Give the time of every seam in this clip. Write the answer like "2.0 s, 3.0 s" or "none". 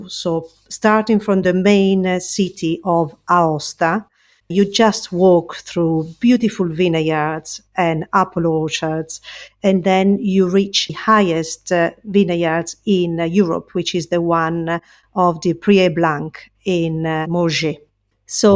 4.4 s, 10.9 s